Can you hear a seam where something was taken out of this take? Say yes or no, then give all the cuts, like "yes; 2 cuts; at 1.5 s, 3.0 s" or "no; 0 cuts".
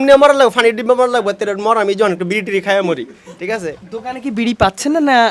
no; 0 cuts